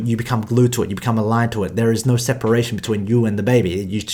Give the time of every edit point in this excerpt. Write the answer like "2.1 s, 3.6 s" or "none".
none